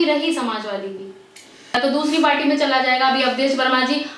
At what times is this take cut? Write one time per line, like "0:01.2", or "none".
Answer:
0:01.7